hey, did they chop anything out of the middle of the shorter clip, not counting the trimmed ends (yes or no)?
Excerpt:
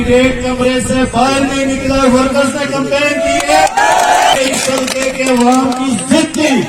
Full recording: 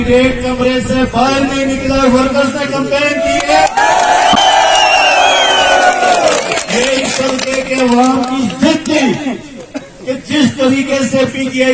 yes